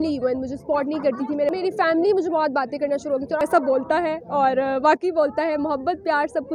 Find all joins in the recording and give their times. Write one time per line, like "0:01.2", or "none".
0:01.5
0:03.4